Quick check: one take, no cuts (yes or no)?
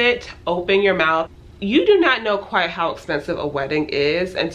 no